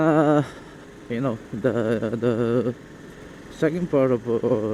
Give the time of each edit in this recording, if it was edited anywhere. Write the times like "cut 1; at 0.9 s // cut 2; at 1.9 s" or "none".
none